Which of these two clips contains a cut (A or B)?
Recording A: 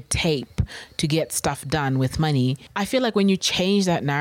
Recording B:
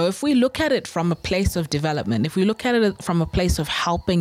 A